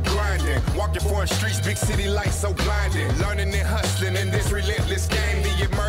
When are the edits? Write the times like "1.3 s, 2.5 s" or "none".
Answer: none